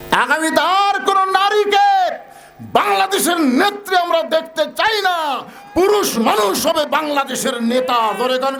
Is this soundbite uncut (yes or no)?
yes